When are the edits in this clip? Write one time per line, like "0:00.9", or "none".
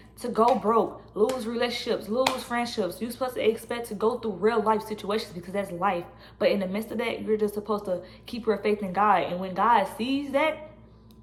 none

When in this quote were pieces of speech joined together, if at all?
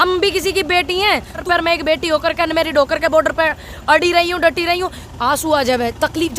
0:01.4
0:05.0

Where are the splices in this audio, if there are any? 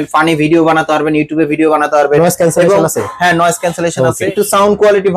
0:04.2

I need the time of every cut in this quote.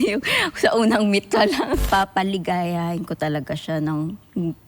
0:01.8

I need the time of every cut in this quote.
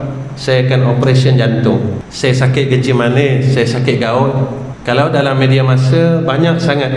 0:02.0
0:04.7

